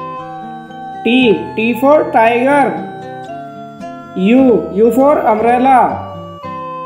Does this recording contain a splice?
yes; 2 cuts; at 2.8 s, 4.1 s

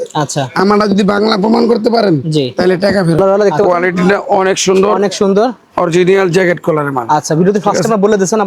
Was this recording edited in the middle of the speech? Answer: yes; 1 cut; at 3.2 s

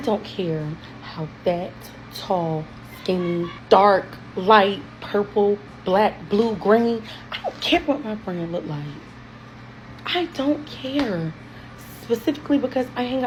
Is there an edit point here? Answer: no; 0 cuts

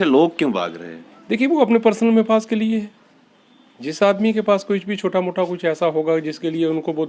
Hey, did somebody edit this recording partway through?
no; 0 cuts

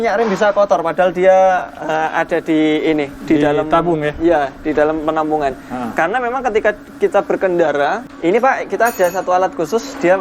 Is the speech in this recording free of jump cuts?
no; 1 cut; at 8.1 s

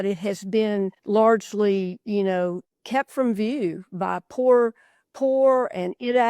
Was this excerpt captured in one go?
no; 2 cuts; at 1.0 s, 2.7 s

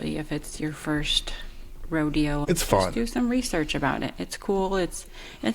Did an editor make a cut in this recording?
yes; 1 cut; at 2.4 s

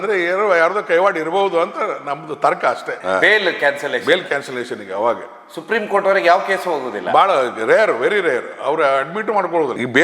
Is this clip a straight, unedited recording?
yes; 0 cuts

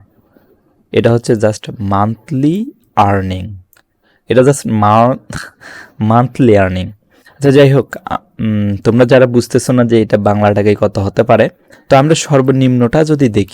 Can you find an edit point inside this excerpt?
yes; 1 cut; at 11.7 s

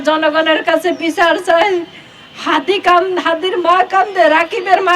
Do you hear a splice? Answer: no; 0 cuts

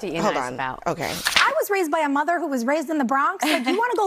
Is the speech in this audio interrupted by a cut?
yes; 1 cut; at 1.2 s

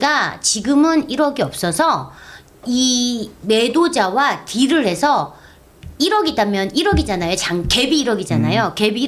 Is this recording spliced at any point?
no; 0 cuts

